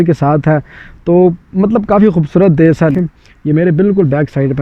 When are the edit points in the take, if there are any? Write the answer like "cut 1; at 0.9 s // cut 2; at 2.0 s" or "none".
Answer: cut 1; at 2.9 s